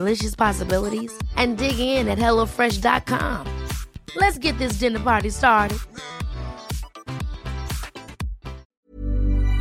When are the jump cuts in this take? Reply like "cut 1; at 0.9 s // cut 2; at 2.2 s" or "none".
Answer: cut 1; at 8.7 s